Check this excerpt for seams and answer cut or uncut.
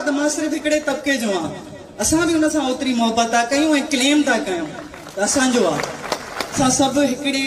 cut